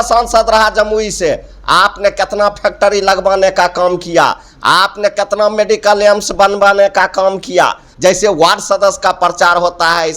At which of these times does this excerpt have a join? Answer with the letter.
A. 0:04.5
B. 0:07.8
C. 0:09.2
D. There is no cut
B